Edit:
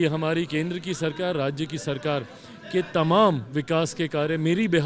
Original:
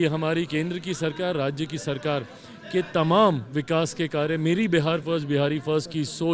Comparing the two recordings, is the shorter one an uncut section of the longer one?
yes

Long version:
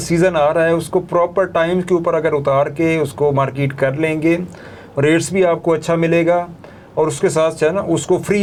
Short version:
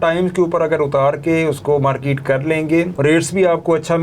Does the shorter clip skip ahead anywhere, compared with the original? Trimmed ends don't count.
yes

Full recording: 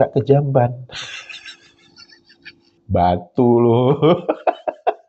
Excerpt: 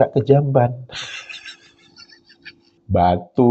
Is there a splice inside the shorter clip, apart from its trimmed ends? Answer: no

